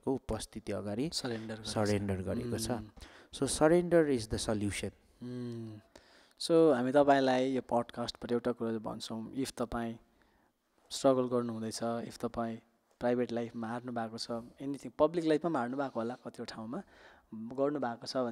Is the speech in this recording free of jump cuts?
yes; 0 cuts

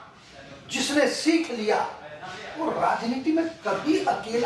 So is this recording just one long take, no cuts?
yes; 0 cuts

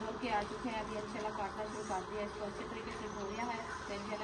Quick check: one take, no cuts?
yes; 0 cuts

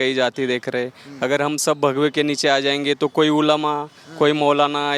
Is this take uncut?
yes; 0 cuts

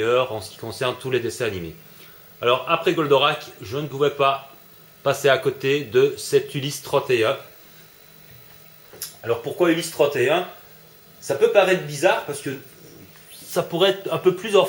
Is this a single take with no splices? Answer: no; 1 cut; at 5.0 s

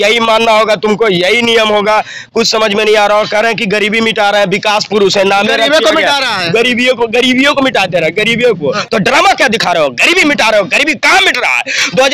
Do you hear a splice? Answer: yes; 1 cut; at 8.8 s

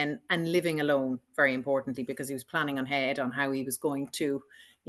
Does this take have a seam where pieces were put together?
no; 0 cuts

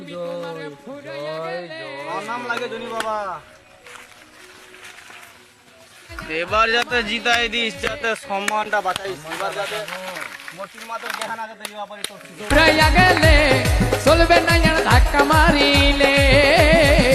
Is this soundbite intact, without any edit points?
yes; 0 cuts

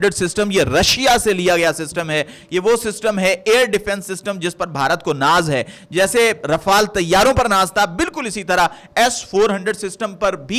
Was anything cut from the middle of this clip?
no; 0 cuts

